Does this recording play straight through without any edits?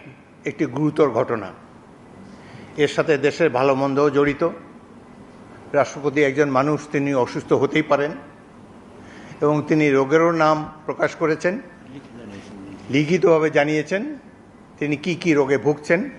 yes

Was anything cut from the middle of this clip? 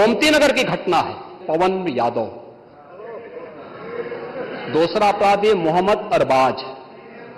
yes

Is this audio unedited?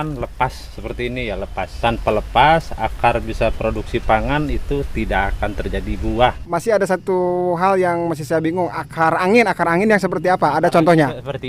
no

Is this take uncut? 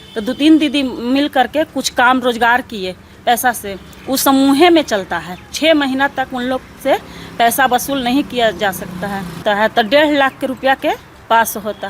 no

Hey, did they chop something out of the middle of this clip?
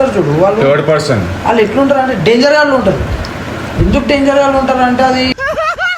no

